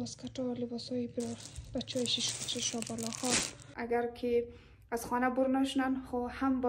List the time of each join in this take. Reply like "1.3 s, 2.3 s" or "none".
3.7 s